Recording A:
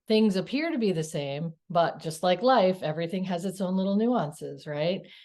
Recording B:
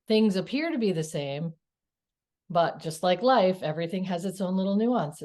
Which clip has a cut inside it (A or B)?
A